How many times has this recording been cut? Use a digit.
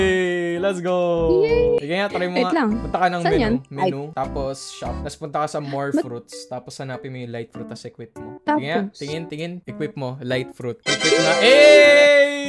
3